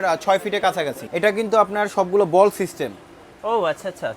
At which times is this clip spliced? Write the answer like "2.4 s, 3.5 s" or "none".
1.0 s